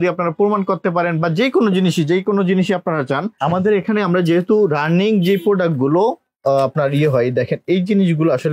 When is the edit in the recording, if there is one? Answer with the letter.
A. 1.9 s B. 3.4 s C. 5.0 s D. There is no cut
B